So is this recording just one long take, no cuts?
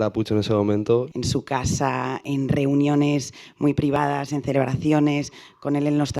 no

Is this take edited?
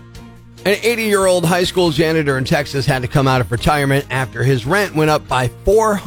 no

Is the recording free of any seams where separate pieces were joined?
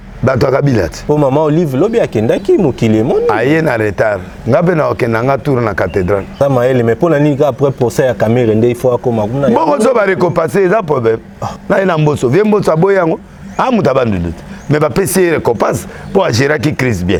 yes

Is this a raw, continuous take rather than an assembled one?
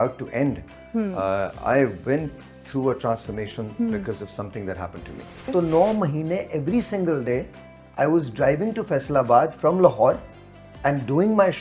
no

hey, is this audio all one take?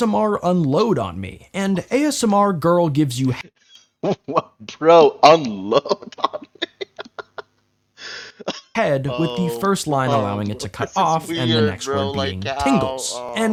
yes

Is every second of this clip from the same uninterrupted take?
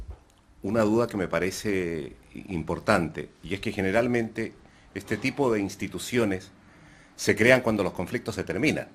yes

